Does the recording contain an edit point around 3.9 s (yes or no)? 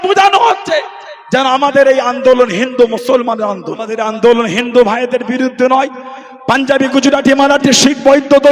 yes